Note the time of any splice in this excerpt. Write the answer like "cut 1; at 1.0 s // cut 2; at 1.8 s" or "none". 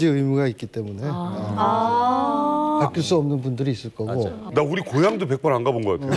none